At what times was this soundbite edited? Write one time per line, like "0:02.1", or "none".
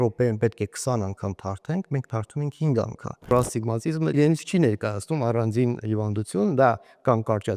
0:03.3